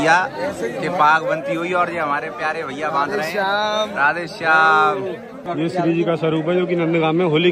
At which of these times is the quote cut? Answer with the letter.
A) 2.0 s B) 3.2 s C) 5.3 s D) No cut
C